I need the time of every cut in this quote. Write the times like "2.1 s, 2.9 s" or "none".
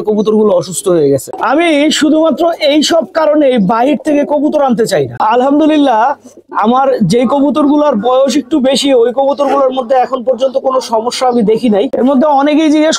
1.3 s, 5.2 s, 11.9 s